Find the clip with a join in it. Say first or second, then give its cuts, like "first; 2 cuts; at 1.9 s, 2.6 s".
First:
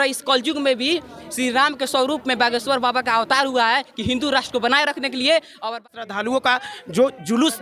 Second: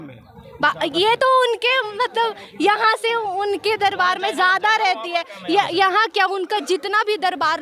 first; 1 cut; at 5.8 s